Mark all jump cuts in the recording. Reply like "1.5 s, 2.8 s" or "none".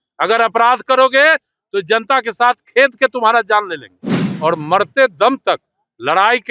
4.2 s